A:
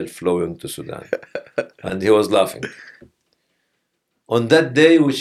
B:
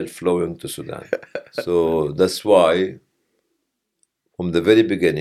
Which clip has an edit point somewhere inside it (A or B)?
B